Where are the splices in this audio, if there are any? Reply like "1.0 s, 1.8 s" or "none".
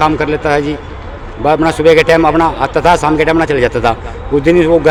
none